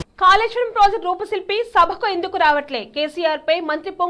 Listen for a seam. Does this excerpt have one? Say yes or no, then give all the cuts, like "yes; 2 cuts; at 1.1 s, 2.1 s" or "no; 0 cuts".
no; 0 cuts